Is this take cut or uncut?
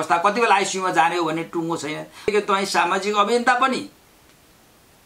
cut